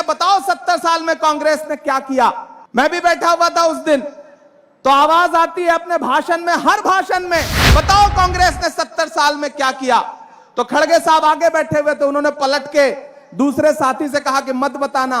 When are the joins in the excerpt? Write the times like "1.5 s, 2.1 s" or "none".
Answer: 2.5 s